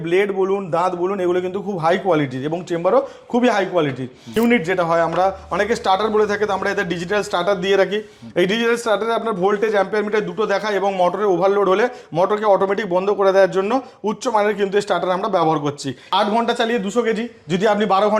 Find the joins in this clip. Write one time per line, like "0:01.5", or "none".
0:04.3
0:16.1